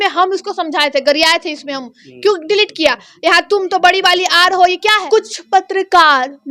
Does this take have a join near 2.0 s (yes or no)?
no